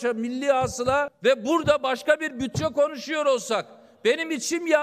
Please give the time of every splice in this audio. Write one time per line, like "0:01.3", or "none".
0:01.1

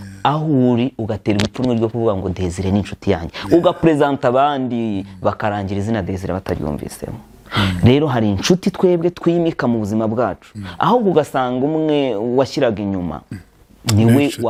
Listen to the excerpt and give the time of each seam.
none

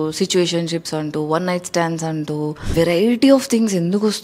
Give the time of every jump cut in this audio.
0:02.7

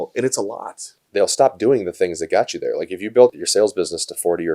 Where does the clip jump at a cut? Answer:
0:01.1
0:03.3

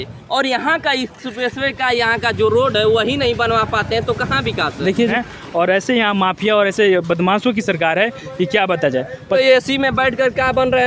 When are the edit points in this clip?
0:05.2
0:09.4

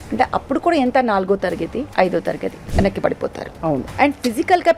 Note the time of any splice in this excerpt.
0:01.9
0:02.6
0:03.9

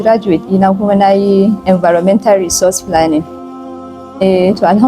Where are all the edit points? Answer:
0:03.4

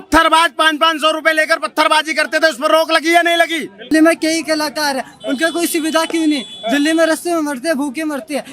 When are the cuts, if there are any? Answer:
0:03.9

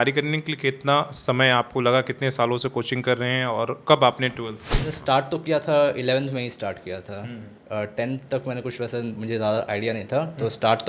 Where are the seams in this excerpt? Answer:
0:04.9

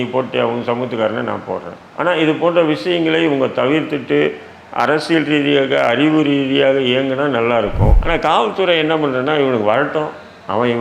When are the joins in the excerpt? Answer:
0:08.0

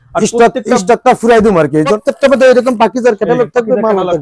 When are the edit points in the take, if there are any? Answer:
0:02.0

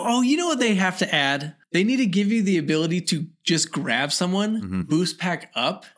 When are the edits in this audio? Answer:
0:01.6

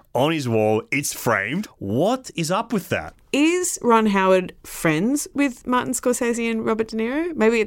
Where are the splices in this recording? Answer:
0:01.6
0:03.2

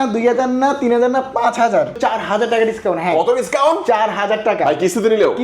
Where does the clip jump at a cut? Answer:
0:02.0

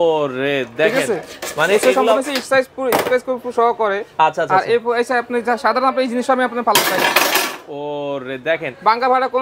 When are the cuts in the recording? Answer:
none

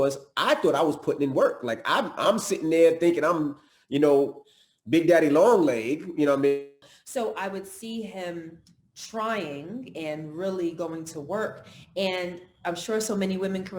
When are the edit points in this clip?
0:06.8

